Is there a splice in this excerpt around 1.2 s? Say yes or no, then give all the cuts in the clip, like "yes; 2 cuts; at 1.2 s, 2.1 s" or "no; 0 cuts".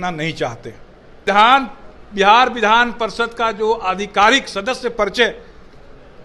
yes; 1 cut; at 1.2 s